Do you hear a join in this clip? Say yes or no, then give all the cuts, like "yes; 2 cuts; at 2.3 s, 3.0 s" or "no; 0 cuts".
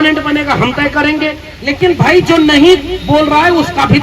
yes; 1 cut; at 1.5 s